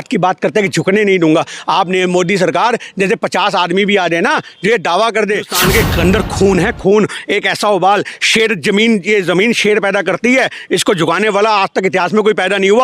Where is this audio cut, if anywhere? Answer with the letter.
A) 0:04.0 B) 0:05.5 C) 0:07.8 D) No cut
B